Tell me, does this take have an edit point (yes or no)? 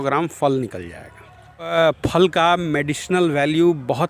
yes